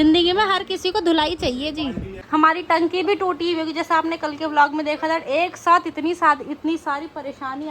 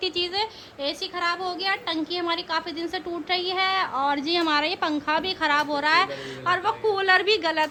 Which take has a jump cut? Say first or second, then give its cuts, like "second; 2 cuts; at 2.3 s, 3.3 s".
first; 1 cut; at 2.1 s